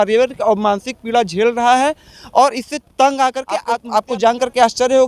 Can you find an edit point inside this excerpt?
yes; 1 cut; at 3.8 s

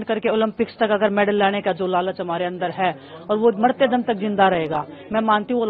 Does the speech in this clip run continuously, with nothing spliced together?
yes; 0 cuts

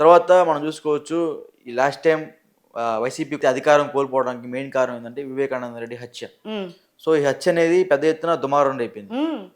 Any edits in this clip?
yes; 1 cut; at 3.4 s

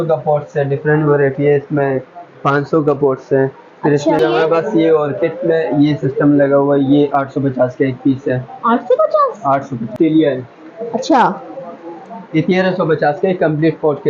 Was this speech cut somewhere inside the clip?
yes; 2 cuts; at 4.2 s, 9.9 s

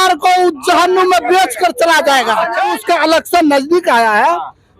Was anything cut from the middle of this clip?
yes; 1 cut; at 2.8 s

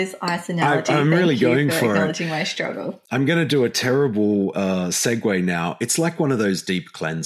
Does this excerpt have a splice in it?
no; 0 cuts

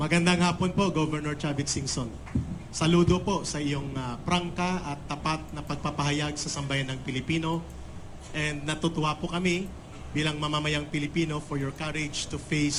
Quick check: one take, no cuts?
yes; 0 cuts

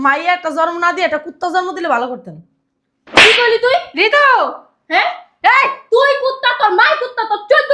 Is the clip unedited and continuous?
yes; 0 cuts

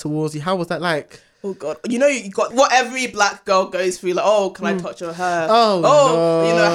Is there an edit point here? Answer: yes; 1 cut; at 2.5 s

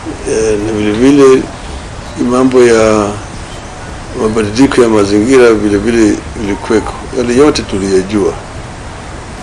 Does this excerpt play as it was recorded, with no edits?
yes; 0 cuts

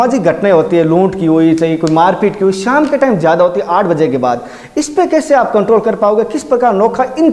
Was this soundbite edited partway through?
no; 0 cuts

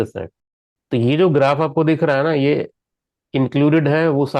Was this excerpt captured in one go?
yes; 0 cuts

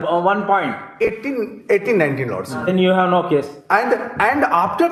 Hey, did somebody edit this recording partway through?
no; 0 cuts

